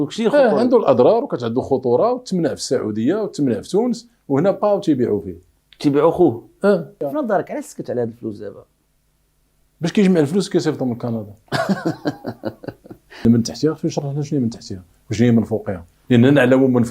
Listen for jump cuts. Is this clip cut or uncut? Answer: cut